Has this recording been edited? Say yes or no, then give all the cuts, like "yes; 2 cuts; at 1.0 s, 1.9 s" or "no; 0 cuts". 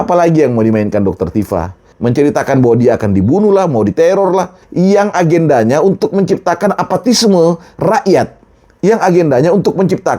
yes; 2 cuts; at 1.8 s, 4.6 s